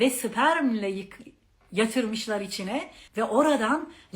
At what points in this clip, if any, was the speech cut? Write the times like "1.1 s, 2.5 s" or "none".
3.0 s

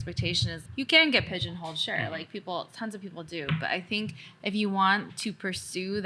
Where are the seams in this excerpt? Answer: 5.1 s

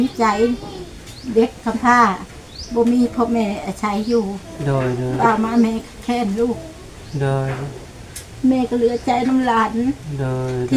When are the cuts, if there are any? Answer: none

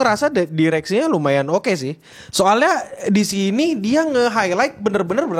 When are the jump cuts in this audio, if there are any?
none

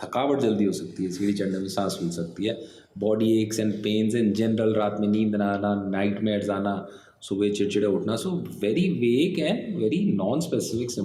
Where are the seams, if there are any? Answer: none

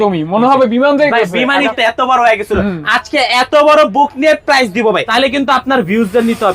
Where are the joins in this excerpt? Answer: 1.7 s, 5.1 s

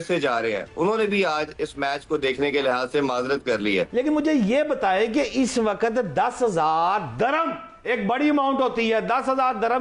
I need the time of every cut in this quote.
3.9 s

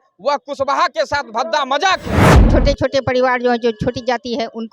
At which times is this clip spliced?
2.3 s

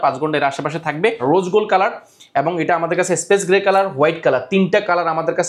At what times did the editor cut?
1.2 s

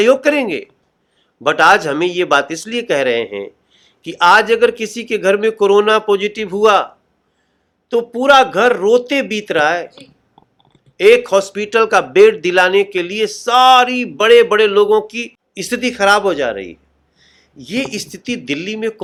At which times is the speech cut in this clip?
none

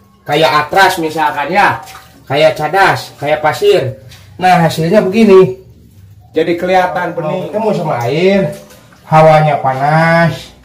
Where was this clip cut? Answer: 7.4 s

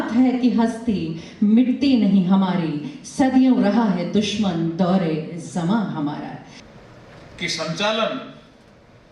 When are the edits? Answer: 6.6 s

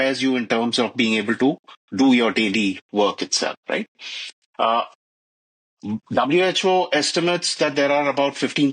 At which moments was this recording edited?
none

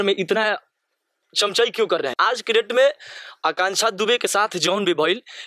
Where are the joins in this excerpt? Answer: 2.2 s

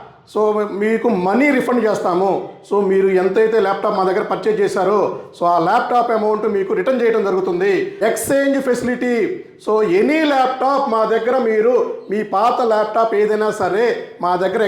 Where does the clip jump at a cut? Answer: 7.9 s

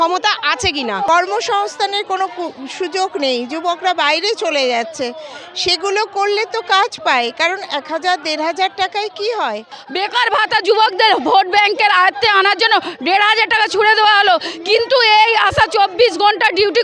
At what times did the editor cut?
1.1 s, 9.8 s

